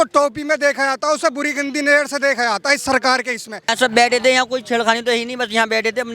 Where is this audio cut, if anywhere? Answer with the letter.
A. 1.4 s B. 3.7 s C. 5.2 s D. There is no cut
B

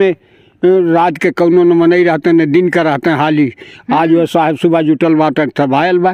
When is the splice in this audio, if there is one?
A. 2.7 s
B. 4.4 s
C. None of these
C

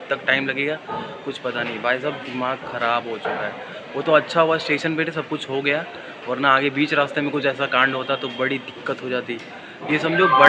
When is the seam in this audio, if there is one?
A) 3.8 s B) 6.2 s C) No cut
C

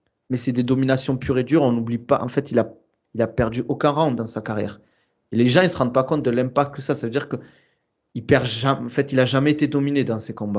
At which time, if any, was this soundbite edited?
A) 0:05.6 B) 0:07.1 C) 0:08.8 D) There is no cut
D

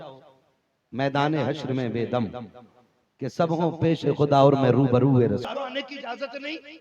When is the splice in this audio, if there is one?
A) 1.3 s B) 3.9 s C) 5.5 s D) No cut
C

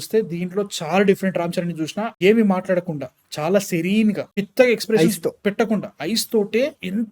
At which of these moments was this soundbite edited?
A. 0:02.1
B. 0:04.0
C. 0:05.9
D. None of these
A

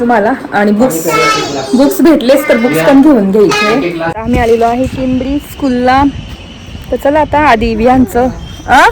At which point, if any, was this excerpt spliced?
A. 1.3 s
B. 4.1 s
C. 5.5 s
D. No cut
B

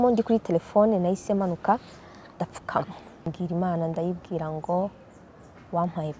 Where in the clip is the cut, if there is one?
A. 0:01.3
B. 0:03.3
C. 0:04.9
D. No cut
B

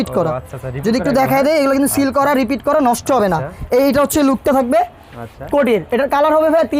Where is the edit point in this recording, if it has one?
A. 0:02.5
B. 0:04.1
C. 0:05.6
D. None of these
D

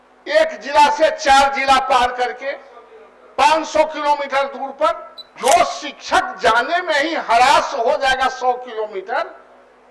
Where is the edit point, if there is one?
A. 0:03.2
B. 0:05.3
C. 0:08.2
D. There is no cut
B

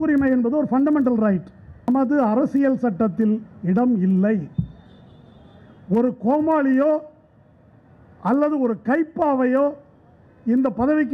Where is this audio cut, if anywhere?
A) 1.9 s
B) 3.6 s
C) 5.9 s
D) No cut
A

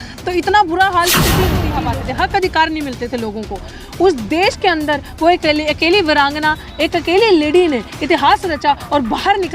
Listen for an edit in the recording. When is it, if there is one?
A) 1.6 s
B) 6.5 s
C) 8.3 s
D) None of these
A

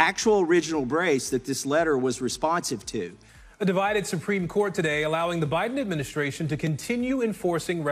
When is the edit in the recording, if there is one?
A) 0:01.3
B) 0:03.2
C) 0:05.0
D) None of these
B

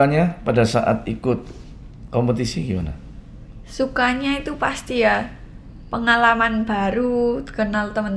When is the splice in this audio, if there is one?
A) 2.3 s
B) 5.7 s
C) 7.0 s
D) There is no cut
D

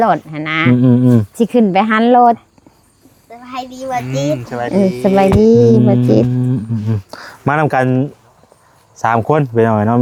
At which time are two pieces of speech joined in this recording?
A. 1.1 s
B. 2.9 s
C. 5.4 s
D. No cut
D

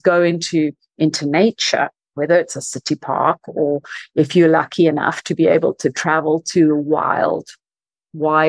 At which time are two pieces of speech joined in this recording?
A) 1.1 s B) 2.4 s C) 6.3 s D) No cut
D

